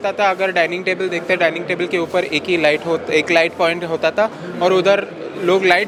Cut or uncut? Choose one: uncut